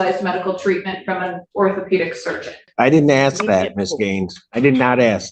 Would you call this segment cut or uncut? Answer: cut